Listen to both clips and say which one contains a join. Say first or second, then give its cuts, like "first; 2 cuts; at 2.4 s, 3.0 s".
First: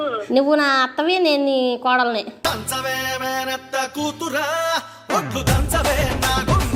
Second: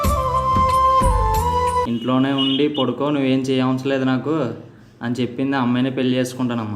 second; 1 cut; at 1.9 s